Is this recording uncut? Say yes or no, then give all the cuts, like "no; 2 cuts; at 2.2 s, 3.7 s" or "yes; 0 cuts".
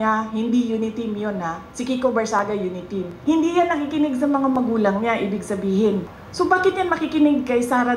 no; 1 cut; at 6.2 s